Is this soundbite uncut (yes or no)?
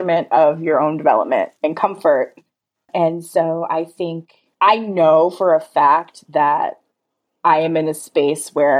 no